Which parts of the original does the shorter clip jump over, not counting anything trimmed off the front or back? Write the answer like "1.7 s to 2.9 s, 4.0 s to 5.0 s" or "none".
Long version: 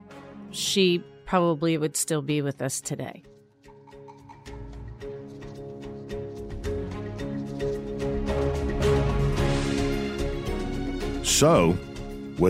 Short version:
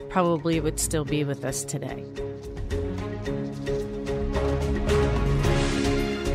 3.1 s to 5.9 s